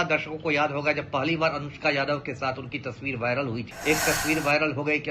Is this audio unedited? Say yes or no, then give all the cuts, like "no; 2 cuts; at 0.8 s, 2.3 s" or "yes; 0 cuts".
no; 1 cut; at 3.7 s